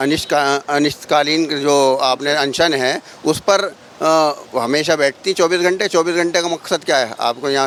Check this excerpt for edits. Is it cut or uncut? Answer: uncut